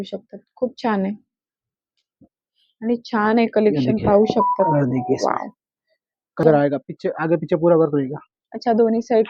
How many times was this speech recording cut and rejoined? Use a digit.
2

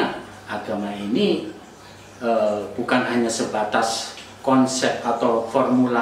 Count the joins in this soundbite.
0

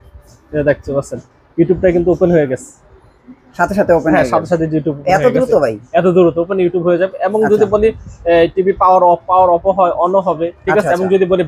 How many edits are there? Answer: 0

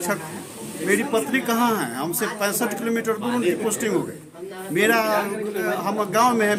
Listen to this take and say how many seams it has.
0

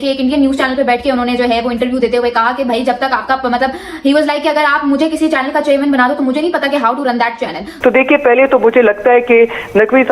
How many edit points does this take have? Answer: 1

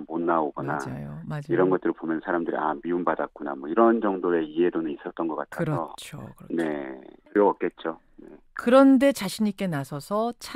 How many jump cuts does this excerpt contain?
1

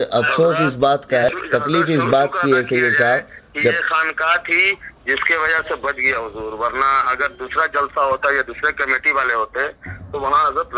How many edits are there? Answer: 1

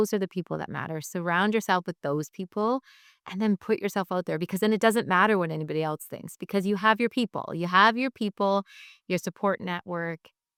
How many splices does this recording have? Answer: 0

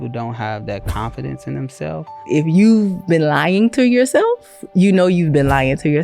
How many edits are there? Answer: 1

